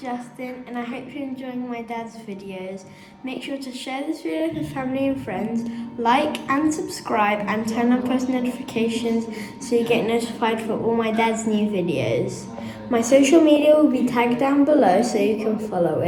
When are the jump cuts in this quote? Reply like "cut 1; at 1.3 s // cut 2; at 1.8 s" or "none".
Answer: none